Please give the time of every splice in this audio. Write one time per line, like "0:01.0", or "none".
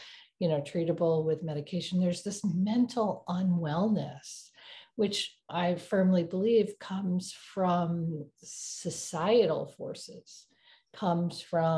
0:05.5